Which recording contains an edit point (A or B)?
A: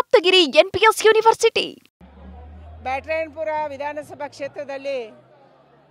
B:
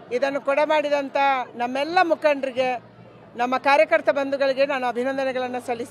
A